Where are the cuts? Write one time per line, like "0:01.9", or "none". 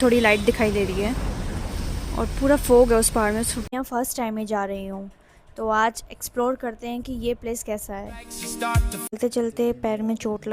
0:03.6
0:09.1